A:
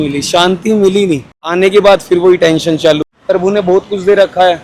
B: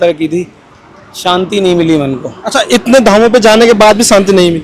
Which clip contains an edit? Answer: A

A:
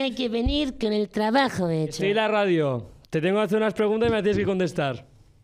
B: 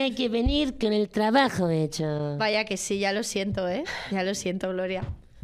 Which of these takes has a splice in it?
A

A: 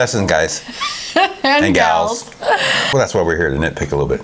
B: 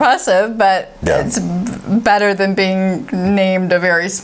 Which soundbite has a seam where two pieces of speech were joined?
A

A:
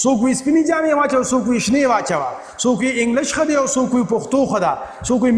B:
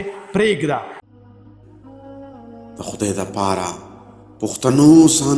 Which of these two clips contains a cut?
B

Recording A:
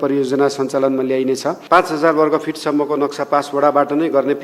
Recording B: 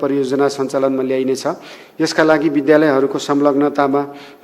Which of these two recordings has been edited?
A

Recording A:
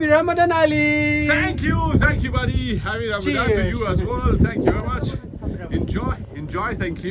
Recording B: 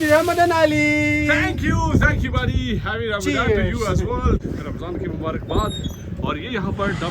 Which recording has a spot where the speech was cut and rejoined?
B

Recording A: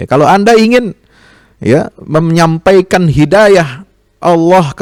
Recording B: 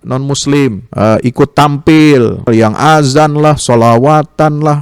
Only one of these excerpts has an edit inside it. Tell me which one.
B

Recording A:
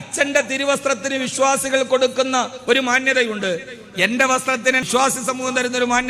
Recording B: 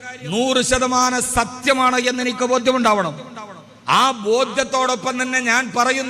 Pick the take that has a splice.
A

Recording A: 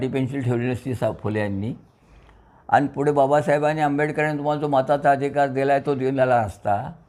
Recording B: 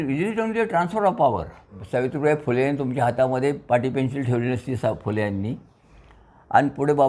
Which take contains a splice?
B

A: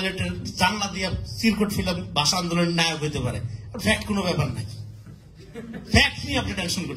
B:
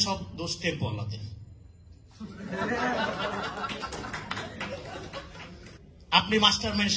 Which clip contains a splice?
B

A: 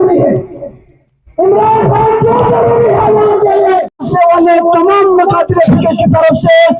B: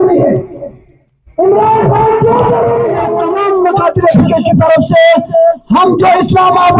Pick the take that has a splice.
B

